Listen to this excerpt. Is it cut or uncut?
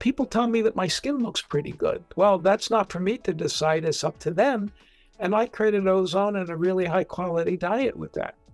uncut